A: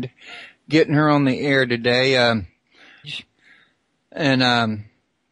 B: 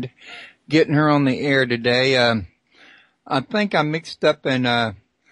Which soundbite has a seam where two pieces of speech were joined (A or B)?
B